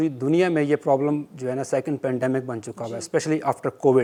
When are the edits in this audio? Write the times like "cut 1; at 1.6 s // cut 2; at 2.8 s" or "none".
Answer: none